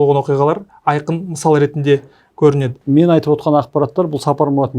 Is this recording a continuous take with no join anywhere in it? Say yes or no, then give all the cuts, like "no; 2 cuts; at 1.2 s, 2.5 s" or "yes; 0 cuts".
no; 1 cut; at 2.8 s